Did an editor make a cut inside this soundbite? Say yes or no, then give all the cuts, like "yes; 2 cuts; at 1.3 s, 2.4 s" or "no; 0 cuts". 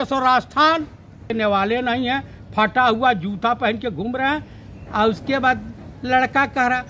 yes; 1 cut; at 1.3 s